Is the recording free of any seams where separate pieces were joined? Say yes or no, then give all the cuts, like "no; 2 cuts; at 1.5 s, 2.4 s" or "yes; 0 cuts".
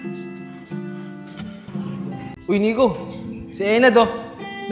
no; 1 cut; at 2.3 s